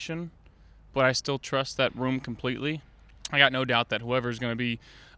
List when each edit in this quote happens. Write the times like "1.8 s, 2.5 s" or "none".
2.9 s